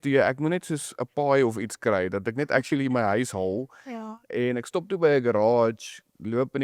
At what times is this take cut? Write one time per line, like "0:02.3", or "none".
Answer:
none